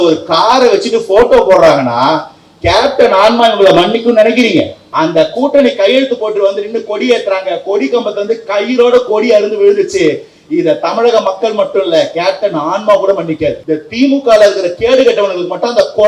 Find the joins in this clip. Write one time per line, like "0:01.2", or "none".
0:04.8
0:13.6

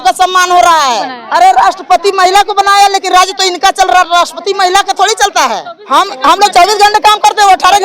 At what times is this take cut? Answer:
0:01.2
0:05.7

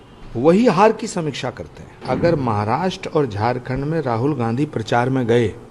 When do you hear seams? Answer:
0:02.0

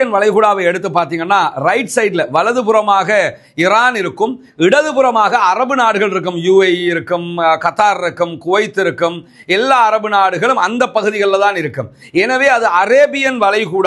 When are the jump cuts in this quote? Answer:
none

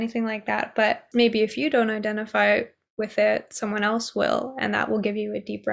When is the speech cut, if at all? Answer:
0:01.0

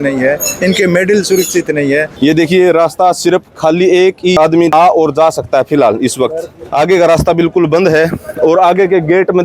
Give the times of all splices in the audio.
0:02.1

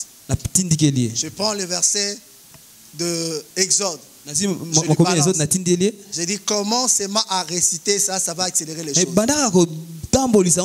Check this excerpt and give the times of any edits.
none

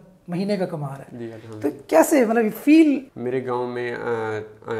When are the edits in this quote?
0:03.1

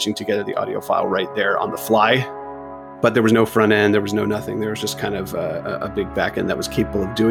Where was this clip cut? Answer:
0:02.7

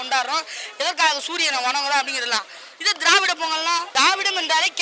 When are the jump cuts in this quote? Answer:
0:03.9

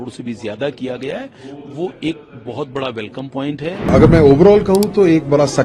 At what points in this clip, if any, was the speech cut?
0:03.8

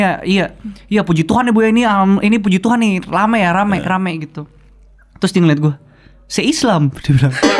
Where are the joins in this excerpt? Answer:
none

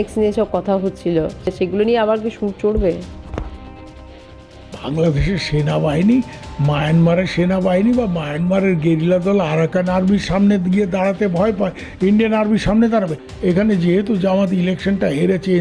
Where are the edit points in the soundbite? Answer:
0:01.5
0:04.2
0:13.2

